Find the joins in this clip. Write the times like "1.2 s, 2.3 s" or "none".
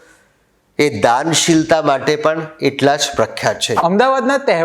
3.7 s